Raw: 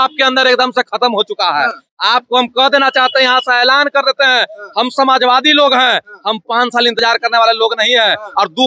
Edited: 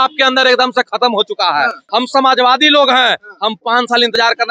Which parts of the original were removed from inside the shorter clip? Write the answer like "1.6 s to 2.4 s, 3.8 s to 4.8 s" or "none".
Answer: 1.8 s to 4.6 s